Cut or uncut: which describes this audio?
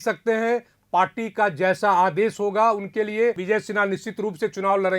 cut